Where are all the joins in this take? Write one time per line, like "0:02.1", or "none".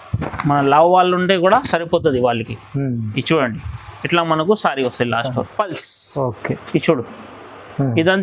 0:05.5

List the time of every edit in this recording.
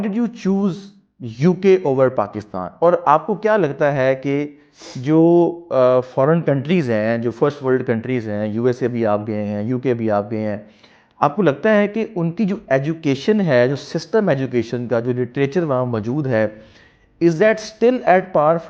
none

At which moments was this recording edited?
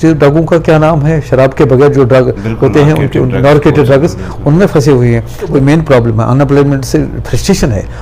0:05.5

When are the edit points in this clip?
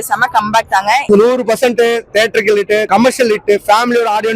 0:01.0
0:02.9

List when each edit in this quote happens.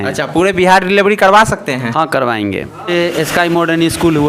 0:02.9

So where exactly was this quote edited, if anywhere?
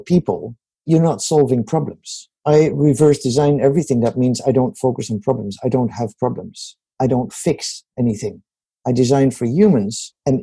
0:00.8
0:02.3

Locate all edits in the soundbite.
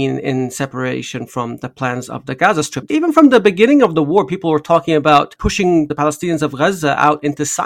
0:02.7
0:05.8

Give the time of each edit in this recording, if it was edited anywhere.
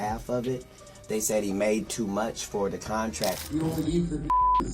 0:03.4

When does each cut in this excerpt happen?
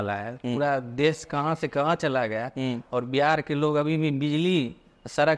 none

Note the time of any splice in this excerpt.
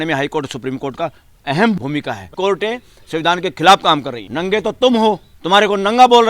0:02.3
0:04.2
0:05.3

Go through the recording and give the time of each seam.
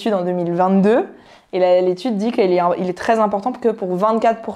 none

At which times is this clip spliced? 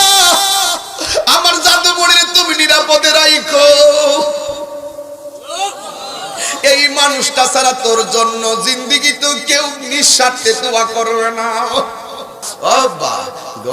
0:12.4

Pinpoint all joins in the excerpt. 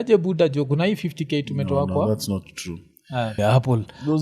0:03.3

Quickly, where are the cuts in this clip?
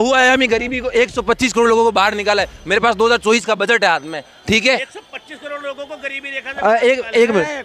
0:04.5

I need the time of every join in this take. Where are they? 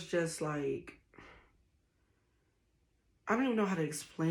none

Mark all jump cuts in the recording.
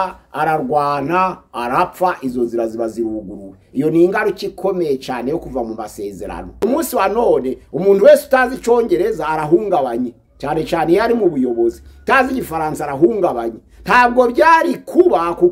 0:06.6

